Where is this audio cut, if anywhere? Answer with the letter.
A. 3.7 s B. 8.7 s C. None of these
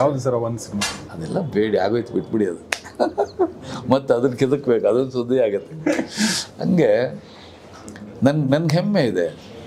C